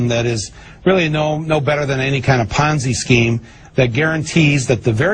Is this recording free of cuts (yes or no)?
no